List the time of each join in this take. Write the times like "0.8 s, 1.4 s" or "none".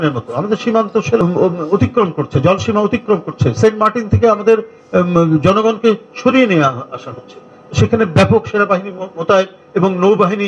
1.2 s

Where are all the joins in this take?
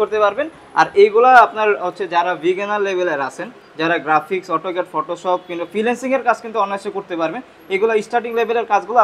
none

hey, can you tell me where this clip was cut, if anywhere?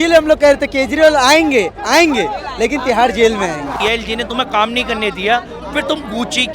3.8 s

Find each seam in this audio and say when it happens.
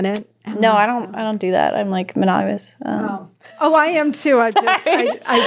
none

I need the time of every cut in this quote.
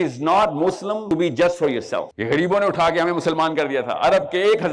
1.0 s, 2.1 s

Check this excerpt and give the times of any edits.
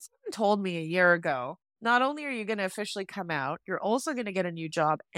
1.6 s

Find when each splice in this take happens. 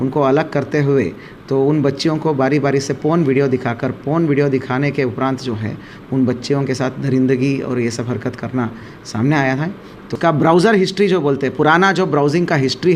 10.1 s

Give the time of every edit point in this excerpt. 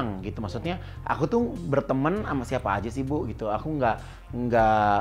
none

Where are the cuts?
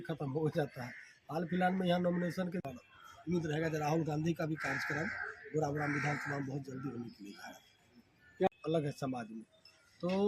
2.6 s, 8.5 s

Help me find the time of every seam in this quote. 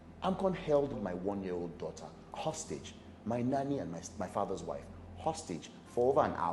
1.0 s, 2.2 s

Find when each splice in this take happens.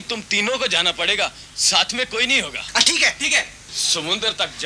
3.6 s

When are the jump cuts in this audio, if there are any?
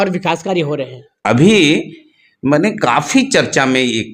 1.0 s

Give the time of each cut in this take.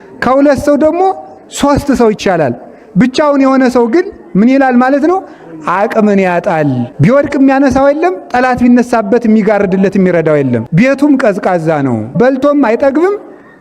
6.9 s, 10.7 s, 12.0 s

